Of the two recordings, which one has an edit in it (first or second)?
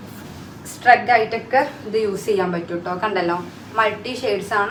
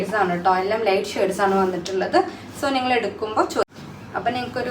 second